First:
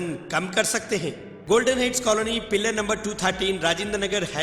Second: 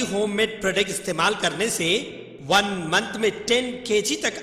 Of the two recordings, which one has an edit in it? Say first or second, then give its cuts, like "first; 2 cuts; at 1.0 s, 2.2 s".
first; 1 cut; at 1.3 s